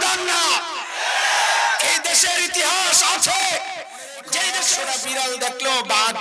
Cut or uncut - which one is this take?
cut